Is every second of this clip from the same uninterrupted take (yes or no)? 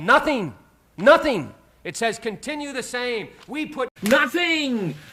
yes